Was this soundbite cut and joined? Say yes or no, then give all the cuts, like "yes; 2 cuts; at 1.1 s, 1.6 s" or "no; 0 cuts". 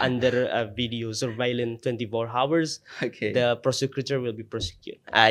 no; 0 cuts